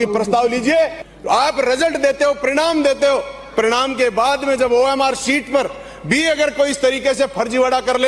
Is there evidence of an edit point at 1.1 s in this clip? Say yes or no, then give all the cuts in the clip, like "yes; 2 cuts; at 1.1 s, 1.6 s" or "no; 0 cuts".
yes; 1 cut; at 1.1 s